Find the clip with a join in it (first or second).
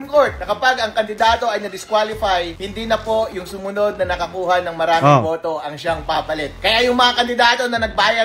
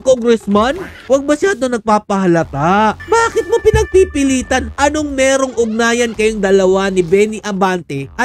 second